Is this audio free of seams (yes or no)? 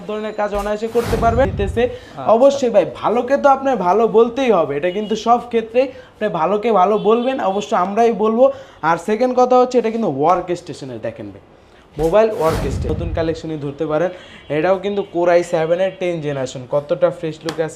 no